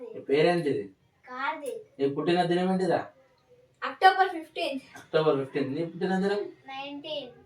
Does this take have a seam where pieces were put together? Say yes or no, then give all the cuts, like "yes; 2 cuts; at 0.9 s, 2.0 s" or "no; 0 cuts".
no; 0 cuts